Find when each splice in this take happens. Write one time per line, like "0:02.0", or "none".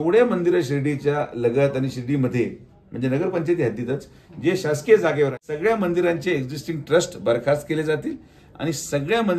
0:05.4